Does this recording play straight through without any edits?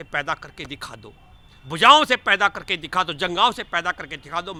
yes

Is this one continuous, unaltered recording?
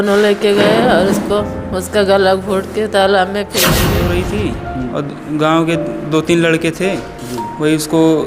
no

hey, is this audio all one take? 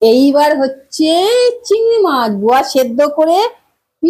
yes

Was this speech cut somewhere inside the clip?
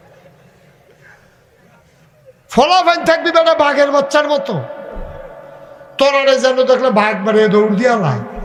no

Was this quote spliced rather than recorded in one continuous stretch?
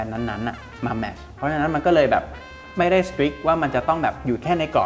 no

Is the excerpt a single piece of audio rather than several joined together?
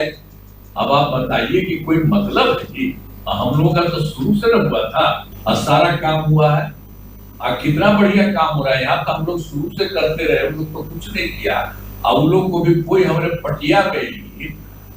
no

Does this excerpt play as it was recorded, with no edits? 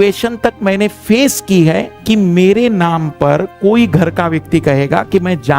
no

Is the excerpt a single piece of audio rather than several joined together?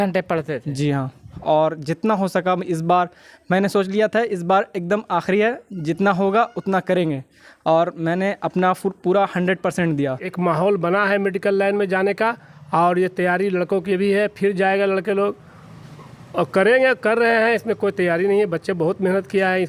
no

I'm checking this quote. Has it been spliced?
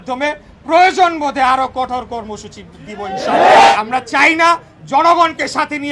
yes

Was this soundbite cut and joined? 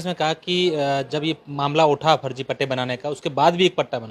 no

